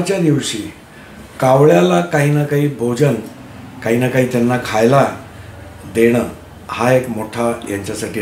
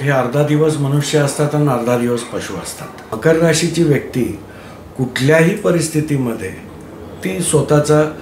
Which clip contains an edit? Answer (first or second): second